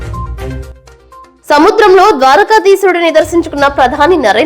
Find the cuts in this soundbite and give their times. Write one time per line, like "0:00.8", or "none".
0:01.3